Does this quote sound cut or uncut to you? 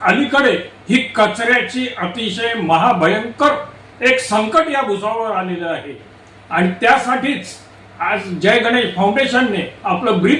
uncut